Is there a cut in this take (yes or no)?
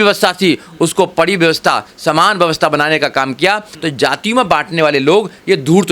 yes